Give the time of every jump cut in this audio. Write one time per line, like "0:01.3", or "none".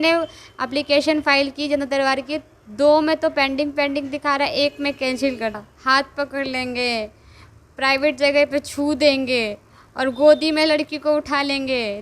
0:05.7